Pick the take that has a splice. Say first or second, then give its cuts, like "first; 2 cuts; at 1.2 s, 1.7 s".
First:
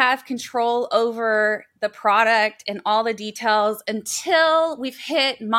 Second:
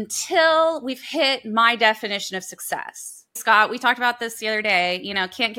second; 1 cut; at 3.4 s